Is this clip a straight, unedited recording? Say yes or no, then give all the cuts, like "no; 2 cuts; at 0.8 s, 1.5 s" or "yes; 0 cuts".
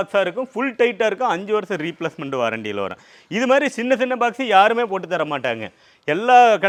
yes; 0 cuts